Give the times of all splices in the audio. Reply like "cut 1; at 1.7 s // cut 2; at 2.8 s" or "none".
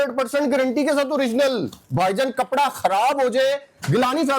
cut 1; at 1.8 s